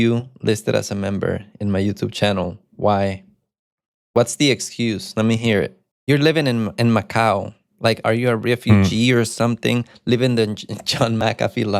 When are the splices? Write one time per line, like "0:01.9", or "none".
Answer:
0:05.9